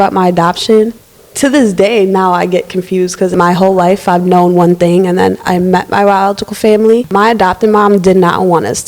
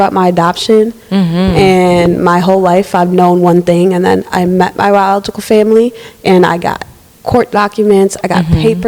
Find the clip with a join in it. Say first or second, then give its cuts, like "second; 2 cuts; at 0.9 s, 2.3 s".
first; 3 cuts; at 1.0 s, 3.3 s, 7.1 s